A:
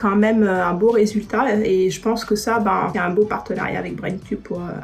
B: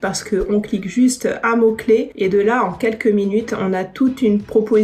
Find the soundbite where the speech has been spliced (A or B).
A